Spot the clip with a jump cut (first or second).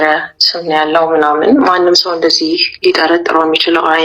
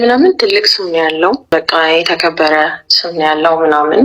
second